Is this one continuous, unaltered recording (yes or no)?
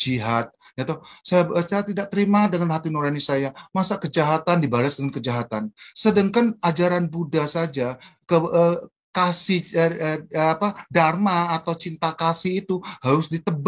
yes